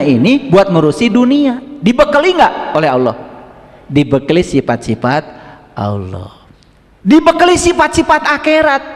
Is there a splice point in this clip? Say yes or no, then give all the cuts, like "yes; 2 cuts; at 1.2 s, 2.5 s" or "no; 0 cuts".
no; 0 cuts